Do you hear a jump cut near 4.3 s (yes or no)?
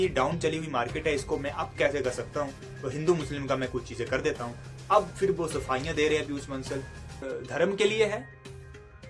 no